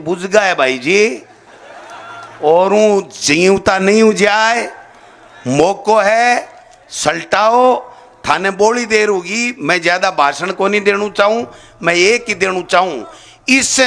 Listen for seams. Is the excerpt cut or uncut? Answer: uncut